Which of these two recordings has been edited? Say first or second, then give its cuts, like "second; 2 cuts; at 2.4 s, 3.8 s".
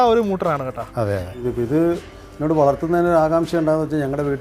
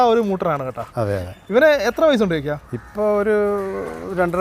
first; 1 cut; at 1.3 s